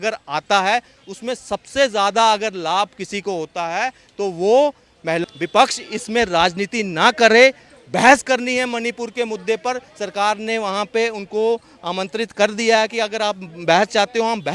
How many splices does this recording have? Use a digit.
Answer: 1